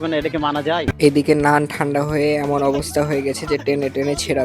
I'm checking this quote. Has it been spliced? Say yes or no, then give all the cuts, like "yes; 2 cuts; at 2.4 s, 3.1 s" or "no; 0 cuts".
yes; 1 cut; at 0.9 s